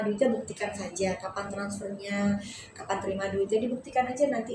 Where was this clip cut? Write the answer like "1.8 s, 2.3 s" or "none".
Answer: none